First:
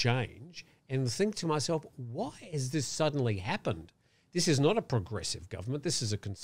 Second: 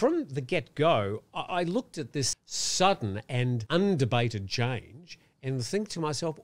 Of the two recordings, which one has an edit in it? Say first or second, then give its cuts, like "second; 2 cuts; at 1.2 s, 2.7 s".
second; 2 cuts; at 2.3 s, 3.6 s